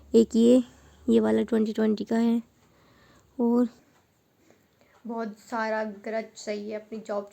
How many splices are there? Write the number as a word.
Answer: one